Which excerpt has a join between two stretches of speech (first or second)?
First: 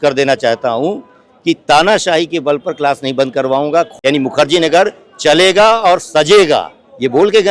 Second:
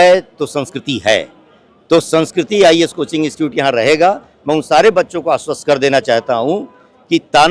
first